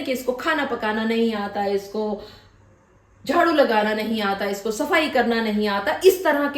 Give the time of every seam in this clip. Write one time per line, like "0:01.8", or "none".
none